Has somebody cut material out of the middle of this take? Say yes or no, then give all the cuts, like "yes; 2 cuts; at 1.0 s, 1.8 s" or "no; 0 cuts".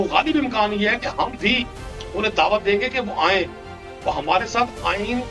no; 0 cuts